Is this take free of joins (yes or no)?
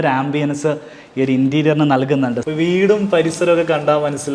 no